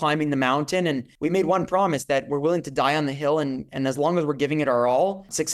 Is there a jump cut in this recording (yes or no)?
no